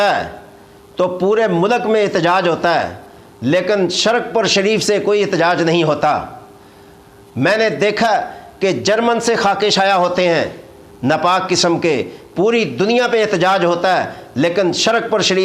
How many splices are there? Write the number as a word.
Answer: zero